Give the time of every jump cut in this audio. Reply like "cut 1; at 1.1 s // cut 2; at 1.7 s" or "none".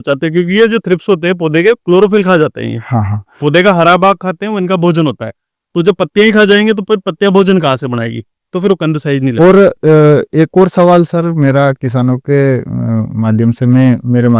none